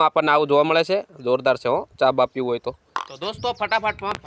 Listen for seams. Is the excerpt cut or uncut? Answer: cut